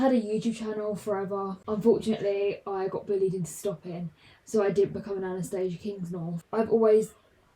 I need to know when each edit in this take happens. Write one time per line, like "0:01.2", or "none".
0:01.6
0:06.4